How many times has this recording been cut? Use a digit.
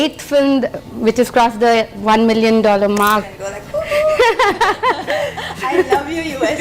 1